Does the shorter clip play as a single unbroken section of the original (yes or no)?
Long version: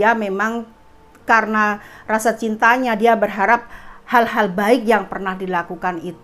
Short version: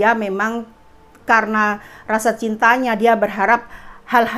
yes